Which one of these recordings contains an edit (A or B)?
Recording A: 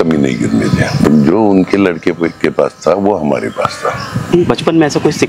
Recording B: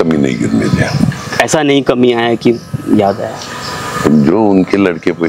A